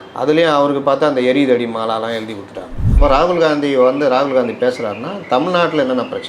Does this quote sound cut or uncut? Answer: cut